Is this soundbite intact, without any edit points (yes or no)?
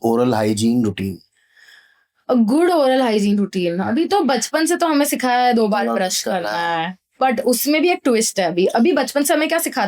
no